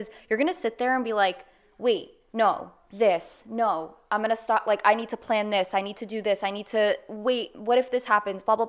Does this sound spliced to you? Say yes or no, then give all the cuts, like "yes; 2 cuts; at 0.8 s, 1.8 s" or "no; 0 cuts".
no; 0 cuts